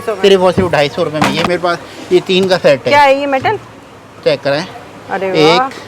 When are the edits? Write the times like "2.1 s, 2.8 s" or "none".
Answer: 1.5 s